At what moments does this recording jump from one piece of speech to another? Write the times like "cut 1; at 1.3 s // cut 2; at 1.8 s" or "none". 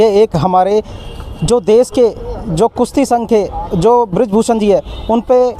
none

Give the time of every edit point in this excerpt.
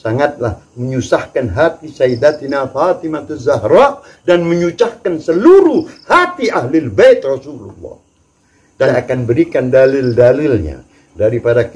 cut 1; at 8.9 s

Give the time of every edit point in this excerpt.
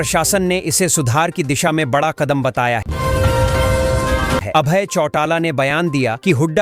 none

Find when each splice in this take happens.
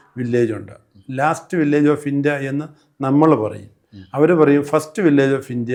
none

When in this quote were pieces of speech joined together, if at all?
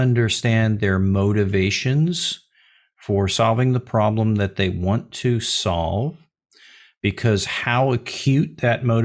none

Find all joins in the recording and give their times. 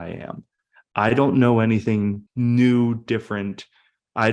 cut 1; at 2.2 s

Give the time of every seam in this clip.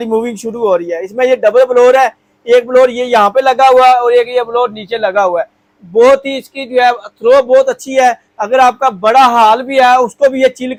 none

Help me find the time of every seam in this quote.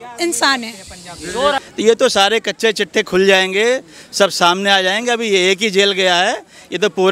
cut 1; at 1.6 s

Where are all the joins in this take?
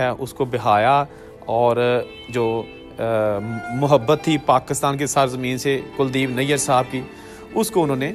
none

